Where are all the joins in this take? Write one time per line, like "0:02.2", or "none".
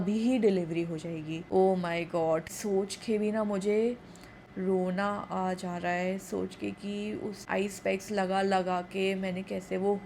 0:01.5
0:02.5
0:07.4